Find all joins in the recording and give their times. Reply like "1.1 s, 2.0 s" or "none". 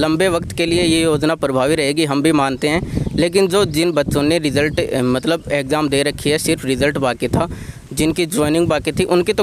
none